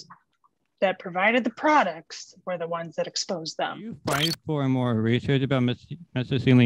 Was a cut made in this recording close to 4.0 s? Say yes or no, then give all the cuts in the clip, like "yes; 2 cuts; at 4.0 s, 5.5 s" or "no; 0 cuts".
yes; 1 cut; at 4.0 s